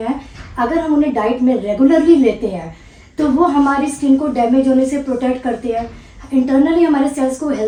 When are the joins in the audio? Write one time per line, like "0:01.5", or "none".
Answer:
none